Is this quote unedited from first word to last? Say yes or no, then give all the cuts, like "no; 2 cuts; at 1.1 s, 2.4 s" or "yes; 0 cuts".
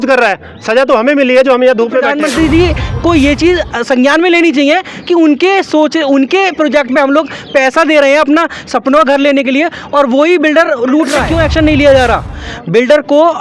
no; 2 cuts; at 2.1 s, 11.3 s